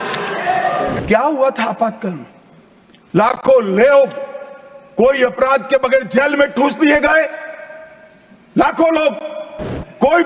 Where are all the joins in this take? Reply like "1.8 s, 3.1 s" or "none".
1.0 s